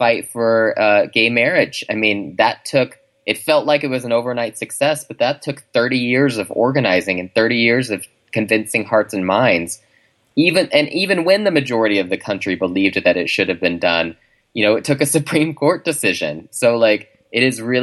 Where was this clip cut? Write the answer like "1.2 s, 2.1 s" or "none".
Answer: none